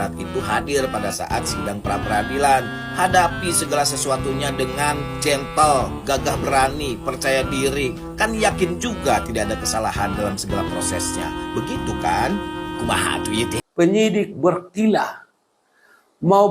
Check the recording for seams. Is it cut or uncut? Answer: cut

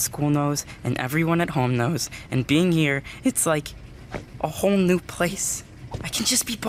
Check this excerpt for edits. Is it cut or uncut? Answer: uncut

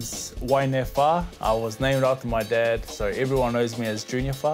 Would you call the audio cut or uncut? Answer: uncut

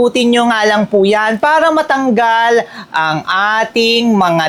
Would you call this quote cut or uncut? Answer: uncut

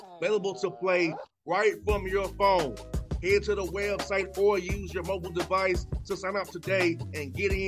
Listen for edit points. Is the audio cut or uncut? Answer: uncut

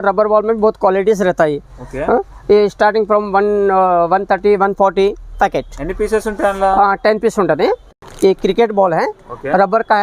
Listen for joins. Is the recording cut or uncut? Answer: cut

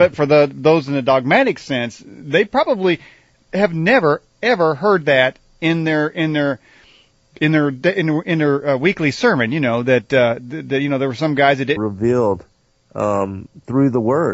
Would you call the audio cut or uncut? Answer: uncut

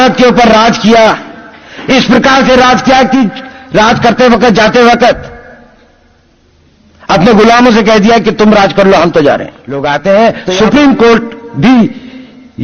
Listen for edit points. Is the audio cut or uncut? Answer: cut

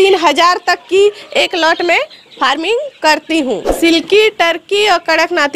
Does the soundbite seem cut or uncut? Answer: cut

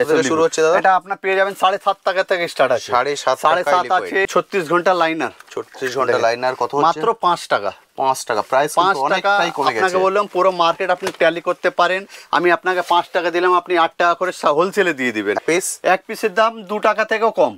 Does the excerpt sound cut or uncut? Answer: cut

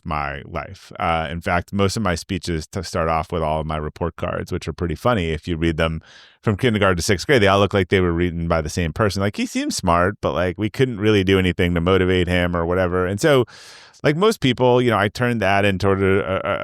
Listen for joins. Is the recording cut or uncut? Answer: uncut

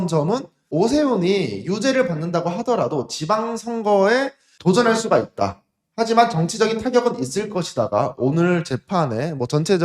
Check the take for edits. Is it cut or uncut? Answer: uncut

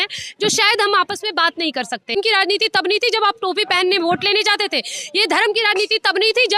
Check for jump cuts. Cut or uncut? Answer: cut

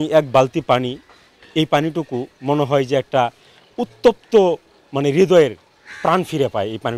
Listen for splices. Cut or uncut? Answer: uncut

